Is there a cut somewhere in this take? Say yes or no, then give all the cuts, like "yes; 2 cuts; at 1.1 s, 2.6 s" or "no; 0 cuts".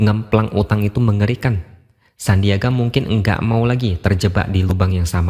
no; 0 cuts